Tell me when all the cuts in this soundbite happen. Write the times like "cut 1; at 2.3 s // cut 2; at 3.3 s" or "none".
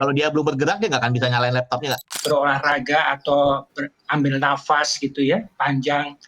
cut 1; at 2.1 s